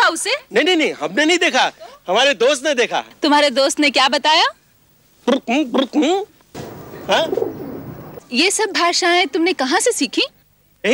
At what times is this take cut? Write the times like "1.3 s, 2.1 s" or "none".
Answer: 3.1 s, 6.4 s, 8.0 s